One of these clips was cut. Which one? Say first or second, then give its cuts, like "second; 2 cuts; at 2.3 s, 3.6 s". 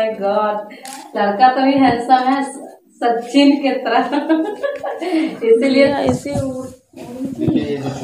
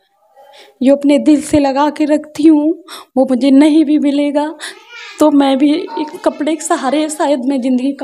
first; 1 cut; at 5.9 s